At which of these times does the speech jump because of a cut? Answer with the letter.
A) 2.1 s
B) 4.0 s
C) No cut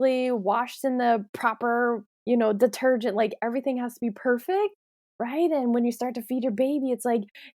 A